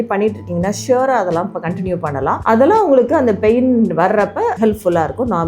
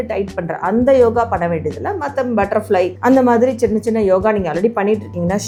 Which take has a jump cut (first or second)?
first